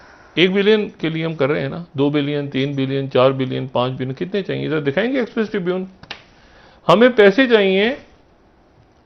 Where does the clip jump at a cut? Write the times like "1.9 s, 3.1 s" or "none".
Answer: none

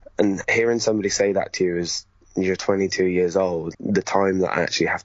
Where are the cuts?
3.7 s

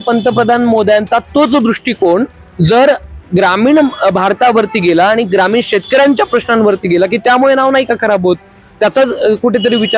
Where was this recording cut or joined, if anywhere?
none

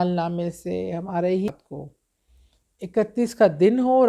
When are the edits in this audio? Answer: 1.5 s

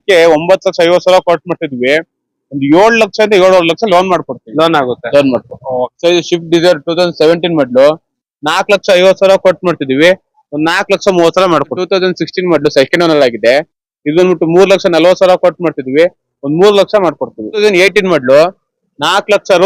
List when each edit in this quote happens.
5.9 s, 11.8 s, 17.6 s

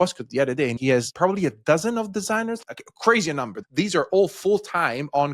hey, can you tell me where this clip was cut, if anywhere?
1.0 s, 2.6 s, 3.6 s

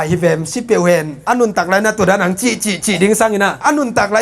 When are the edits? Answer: 1.2 s

